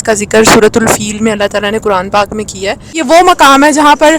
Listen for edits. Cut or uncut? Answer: cut